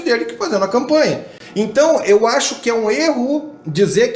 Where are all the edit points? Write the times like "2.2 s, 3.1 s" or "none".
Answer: none